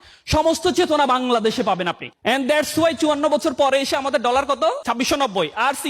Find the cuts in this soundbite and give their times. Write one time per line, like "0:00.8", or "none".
0:02.1
0:04.8